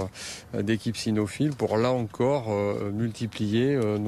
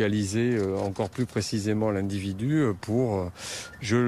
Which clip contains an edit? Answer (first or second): first